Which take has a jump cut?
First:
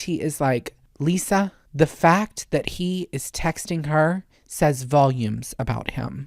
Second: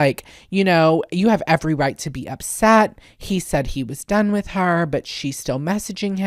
first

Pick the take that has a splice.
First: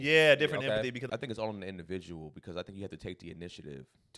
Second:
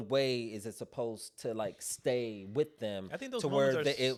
first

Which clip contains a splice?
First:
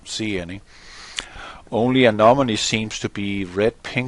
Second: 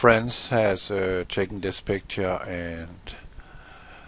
first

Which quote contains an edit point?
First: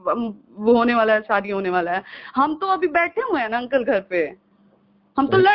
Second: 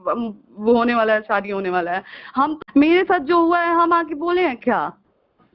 second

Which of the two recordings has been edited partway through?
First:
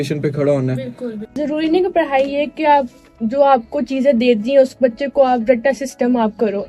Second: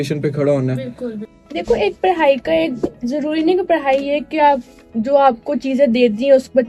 first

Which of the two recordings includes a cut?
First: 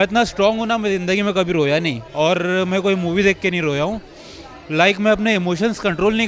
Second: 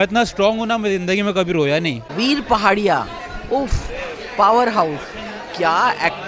second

